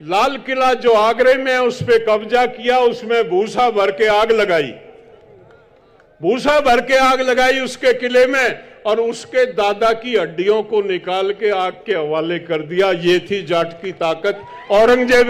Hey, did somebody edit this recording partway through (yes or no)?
no